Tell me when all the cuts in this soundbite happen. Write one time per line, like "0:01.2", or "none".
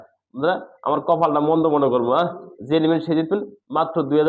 none